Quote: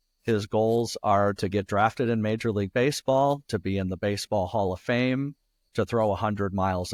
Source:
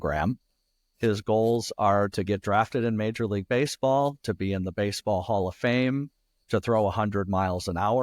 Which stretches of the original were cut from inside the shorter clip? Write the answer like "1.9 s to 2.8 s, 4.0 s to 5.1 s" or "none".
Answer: none